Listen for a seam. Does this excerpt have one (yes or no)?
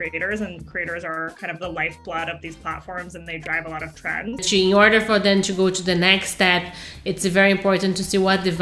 yes